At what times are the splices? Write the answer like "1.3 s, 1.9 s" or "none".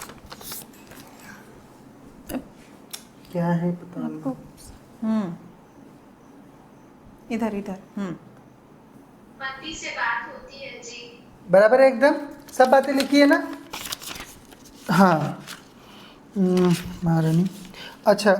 none